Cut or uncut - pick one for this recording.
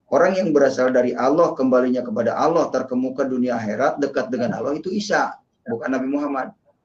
uncut